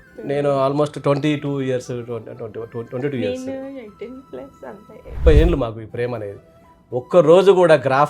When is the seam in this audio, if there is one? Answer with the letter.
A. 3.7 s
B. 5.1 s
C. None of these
B